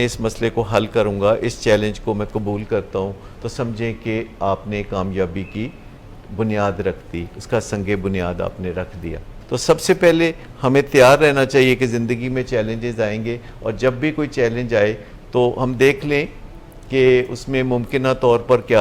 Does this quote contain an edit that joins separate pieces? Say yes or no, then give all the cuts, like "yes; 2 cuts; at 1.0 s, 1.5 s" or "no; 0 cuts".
yes; 1 cut; at 9.3 s